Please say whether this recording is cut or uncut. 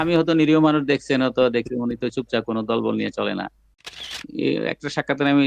cut